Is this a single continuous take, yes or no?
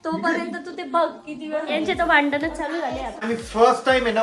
no